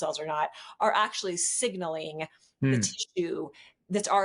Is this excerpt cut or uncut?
uncut